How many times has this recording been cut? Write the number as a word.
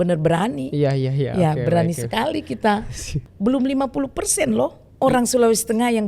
two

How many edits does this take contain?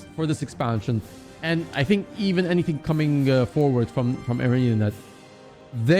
zero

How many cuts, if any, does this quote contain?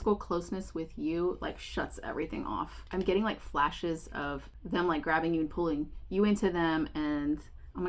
two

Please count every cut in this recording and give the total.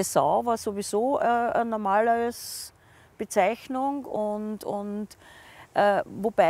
zero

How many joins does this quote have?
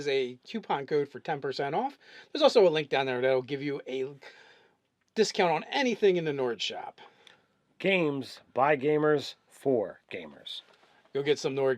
one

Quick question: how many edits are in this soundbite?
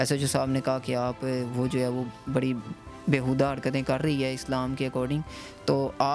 zero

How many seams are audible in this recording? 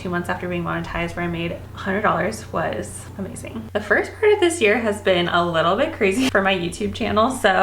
two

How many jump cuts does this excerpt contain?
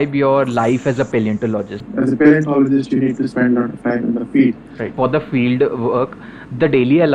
two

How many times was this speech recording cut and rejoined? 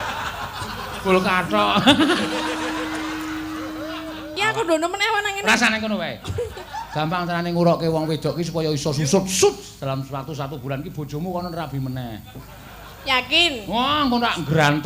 one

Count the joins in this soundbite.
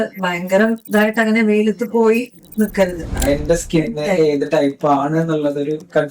one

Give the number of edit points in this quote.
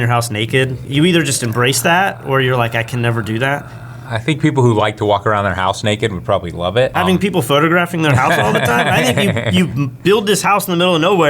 two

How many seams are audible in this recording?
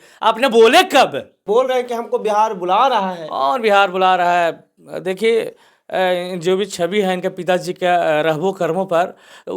one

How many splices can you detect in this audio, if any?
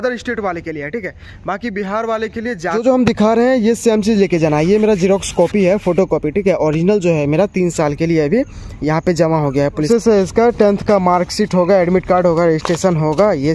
two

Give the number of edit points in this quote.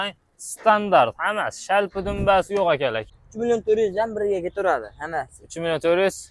one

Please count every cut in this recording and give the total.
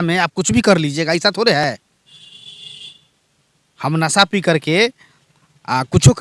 zero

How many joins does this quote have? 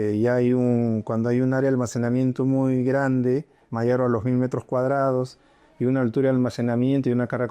zero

